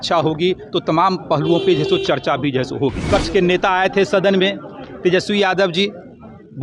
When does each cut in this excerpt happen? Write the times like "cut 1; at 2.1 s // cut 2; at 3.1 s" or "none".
cut 1; at 3.1 s